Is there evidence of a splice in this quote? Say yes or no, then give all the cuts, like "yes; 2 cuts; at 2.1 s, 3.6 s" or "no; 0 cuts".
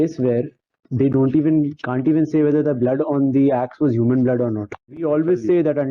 yes; 1 cut; at 4.8 s